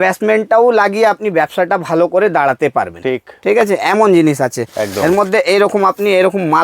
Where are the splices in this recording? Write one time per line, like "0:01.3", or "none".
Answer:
none